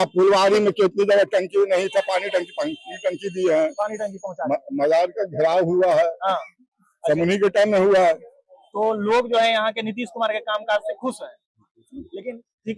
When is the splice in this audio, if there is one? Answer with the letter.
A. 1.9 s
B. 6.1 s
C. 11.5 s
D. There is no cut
D